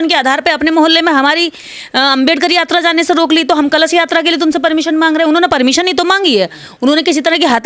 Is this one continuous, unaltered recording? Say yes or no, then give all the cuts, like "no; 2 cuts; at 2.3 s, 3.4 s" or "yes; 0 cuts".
yes; 0 cuts